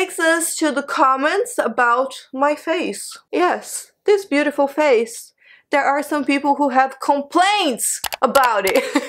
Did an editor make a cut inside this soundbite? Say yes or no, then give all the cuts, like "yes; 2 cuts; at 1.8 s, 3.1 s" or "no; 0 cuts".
no; 0 cuts